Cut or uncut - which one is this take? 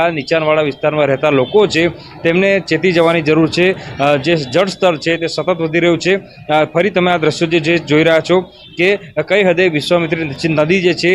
uncut